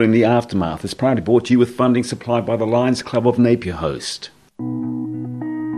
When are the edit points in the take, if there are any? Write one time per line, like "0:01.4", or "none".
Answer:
0:04.6